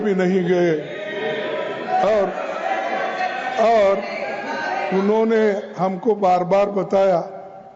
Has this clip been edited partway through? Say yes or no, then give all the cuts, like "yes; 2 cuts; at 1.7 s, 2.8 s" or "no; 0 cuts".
yes; 1 cut; at 1.4 s